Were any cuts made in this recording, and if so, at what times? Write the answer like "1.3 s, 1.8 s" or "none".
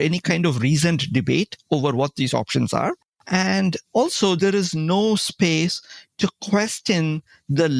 none